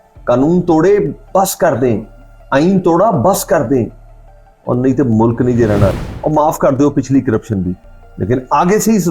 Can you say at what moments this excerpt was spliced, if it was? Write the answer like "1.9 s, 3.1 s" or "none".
5.9 s